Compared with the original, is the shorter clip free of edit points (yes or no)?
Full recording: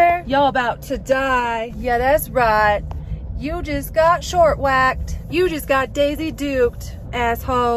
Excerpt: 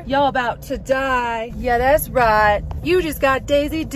no